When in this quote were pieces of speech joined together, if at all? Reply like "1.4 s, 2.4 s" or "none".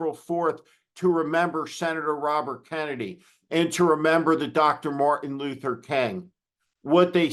none